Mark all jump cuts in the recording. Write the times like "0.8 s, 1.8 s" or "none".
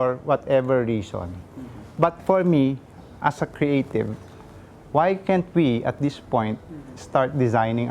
2.2 s